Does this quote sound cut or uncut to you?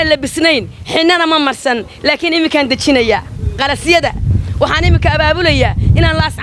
uncut